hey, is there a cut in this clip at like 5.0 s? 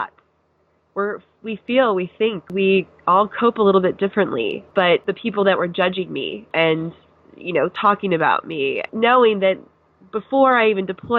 yes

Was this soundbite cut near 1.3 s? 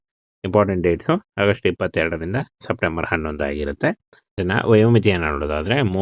no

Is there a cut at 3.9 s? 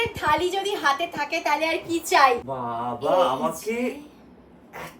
no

